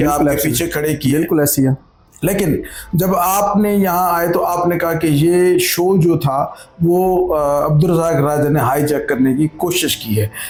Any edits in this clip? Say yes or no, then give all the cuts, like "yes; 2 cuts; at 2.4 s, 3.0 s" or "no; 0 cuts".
no; 0 cuts